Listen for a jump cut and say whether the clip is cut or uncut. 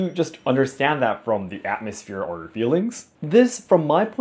uncut